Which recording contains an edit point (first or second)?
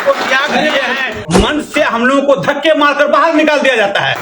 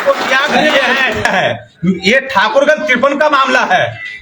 first